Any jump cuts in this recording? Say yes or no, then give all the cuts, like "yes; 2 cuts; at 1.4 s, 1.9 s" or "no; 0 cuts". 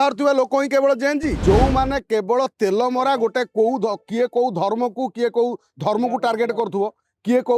yes; 1 cut; at 1.4 s